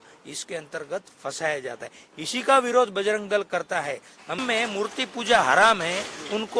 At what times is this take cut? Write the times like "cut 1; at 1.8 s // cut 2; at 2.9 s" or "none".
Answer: cut 1; at 4.4 s